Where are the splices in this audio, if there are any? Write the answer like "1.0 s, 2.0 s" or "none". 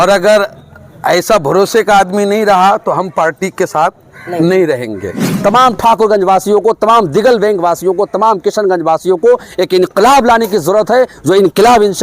5.2 s